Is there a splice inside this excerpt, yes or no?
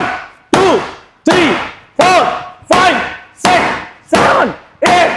no